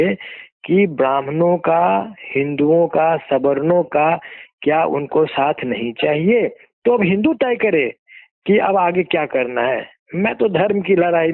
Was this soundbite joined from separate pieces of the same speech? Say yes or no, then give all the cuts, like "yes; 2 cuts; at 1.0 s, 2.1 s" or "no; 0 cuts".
yes; 1 cut; at 6.7 s